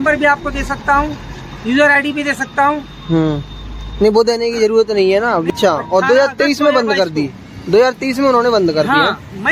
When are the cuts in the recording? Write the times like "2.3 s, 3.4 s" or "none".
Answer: 5.5 s